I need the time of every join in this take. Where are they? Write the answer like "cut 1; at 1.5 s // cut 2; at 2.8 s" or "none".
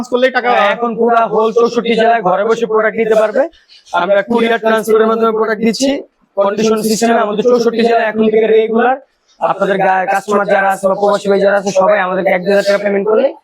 none

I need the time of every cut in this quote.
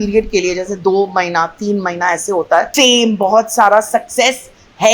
cut 1; at 2.7 s

